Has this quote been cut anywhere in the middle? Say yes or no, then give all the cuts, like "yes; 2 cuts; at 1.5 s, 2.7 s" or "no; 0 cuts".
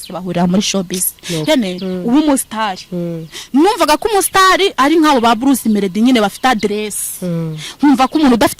yes; 1 cut; at 1.4 s